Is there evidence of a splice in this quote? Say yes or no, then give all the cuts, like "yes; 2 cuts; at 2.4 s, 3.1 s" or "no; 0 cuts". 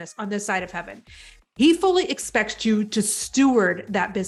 no; 0 cuts